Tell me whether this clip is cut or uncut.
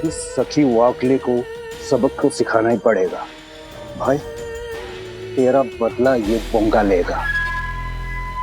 cut